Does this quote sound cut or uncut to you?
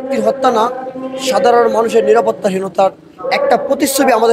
uncut